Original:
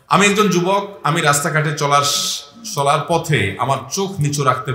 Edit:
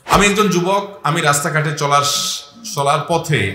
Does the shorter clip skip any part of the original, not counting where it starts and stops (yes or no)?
no